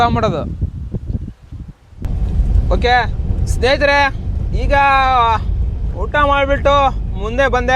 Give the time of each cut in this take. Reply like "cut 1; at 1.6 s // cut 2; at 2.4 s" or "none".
cut 1; at 2.1 s